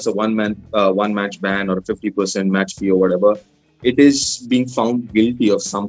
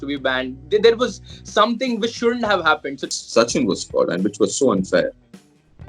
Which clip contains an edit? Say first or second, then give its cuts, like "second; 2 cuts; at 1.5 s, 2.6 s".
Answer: second; 1 cut; at 3.1 s